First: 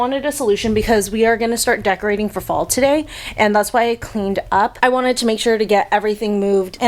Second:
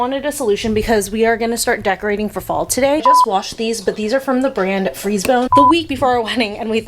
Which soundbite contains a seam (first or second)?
second